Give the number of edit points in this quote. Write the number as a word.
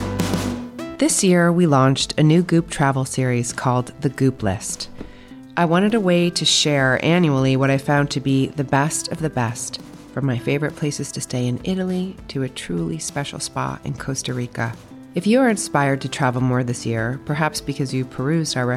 one